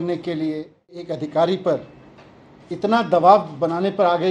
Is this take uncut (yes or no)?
no